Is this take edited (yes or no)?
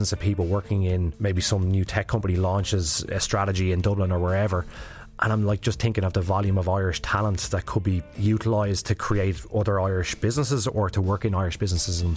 yes